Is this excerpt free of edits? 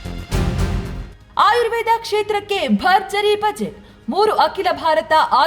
no; 1 cut; at 1.3 s

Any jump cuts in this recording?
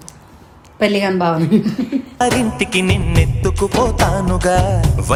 no; 0 cuts

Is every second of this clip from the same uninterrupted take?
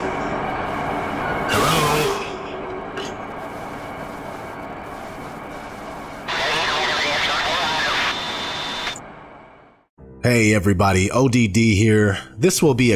yes; 0 cuts

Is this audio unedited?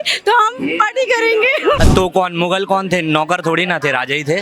no; 1 cut; at 1.8 s

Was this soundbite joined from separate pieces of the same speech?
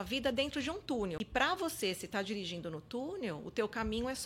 yes; 1 cut; at 1.2 s

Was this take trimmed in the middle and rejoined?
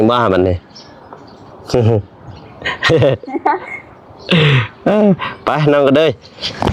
no; 0 cuts

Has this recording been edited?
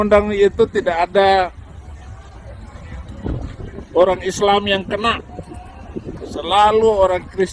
no; 0 cuts

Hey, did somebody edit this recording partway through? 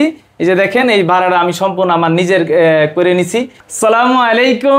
yes; 1 cut; at 3.6 s

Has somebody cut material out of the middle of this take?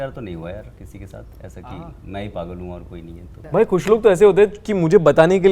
yes; 1 cut; at 3.4 s

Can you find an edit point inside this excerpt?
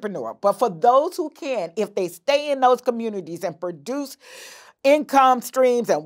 no; 0 cuts

